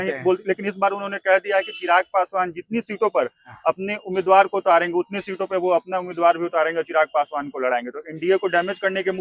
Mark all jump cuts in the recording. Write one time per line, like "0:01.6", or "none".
none